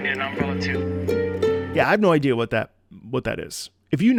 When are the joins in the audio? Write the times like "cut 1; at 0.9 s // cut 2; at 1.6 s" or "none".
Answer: none